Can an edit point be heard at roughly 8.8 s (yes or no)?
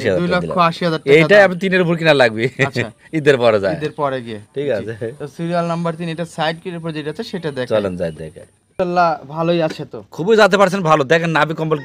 yes